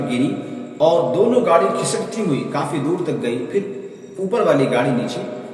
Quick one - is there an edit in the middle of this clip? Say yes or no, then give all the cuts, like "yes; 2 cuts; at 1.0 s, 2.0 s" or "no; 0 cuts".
no; 0 cuts